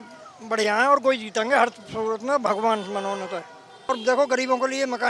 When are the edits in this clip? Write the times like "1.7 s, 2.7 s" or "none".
3.8 s